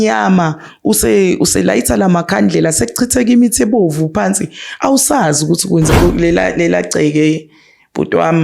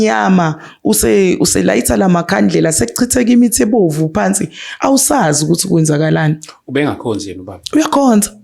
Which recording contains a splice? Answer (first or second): first